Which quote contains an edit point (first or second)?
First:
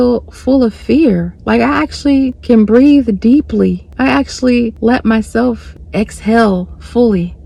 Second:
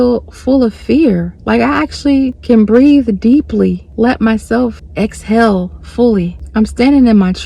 second